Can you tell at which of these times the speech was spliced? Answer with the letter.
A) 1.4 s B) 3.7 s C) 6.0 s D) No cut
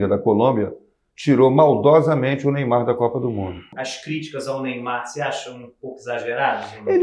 B